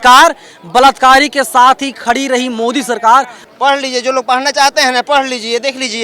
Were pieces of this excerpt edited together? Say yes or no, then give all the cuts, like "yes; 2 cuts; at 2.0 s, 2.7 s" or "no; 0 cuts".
yes; 1 cut; at 3.4 s